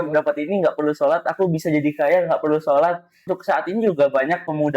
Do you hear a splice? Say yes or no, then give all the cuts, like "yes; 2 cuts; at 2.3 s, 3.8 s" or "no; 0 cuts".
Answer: yes; 1 cut; at 3.2 s